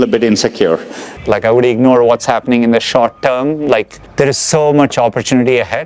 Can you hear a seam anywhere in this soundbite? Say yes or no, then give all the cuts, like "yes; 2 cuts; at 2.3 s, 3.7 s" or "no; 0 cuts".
yes; 1 cut; at 1.1 s